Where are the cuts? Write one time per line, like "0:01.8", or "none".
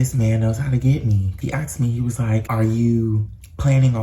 0:01.3